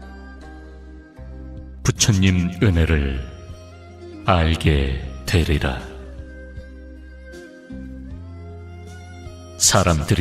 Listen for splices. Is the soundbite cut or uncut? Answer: uncut